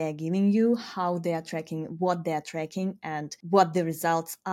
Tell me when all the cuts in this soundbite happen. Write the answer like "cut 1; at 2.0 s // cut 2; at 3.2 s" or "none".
cut 1; at 3.3 s